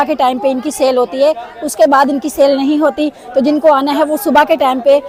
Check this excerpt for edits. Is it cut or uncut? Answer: uncut